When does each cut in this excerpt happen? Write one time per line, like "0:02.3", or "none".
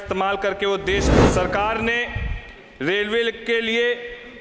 0:01.1